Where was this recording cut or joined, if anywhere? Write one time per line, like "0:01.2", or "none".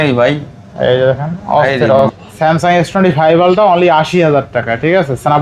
0:02.0